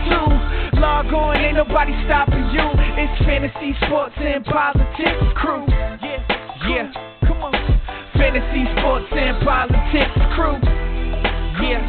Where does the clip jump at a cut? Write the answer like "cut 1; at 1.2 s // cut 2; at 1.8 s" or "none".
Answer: cut 1; at 10.7 s